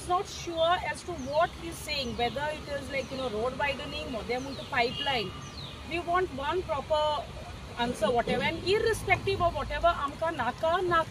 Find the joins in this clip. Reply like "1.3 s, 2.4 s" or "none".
none